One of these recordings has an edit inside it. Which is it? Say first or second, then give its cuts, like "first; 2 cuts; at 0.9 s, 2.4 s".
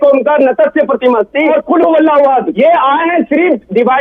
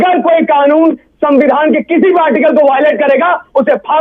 first; 2 cuts; at 1.5 s, 2.5 s